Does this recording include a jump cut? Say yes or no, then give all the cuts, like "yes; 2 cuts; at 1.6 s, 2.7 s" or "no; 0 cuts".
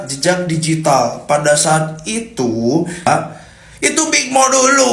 yes; 1 cut; at 3.1 s